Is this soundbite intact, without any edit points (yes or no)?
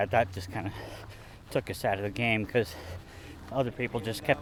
yes